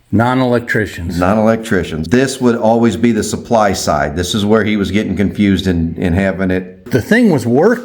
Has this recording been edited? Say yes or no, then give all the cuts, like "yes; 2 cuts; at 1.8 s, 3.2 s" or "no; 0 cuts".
yes; 2 cuts; at 2.0 s, 6.8 s